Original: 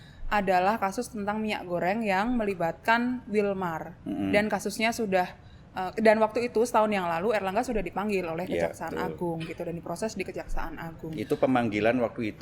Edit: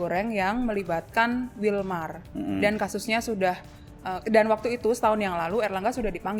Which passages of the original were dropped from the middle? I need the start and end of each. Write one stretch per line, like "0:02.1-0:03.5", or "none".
none